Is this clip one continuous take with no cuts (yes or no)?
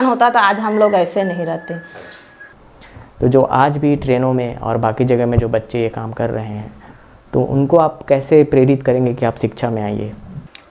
no